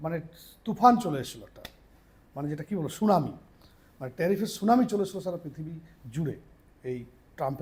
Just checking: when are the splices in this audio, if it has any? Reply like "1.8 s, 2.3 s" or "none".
none